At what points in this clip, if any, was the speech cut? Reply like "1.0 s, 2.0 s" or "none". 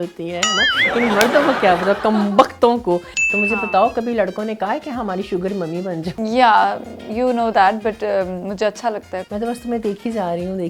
3.1 s, 6.1 s, 9.2 s